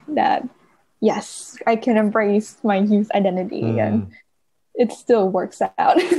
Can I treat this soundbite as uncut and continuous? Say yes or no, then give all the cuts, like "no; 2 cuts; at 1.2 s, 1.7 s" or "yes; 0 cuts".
yes; 0 cuts